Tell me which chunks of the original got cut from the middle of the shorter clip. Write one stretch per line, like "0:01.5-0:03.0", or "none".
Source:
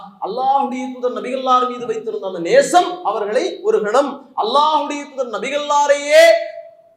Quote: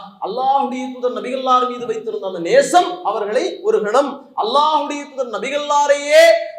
none